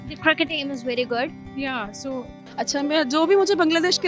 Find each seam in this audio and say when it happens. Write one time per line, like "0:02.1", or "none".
0:02.4